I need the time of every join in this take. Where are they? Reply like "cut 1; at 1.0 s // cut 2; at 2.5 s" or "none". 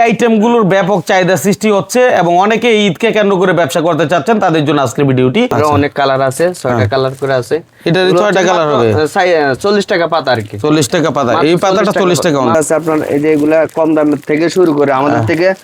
cut 1; at 5.5 s // cut 2; at 12.5 s